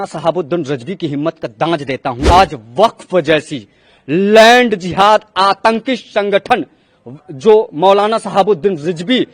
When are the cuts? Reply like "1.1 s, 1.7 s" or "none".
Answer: 2.2 s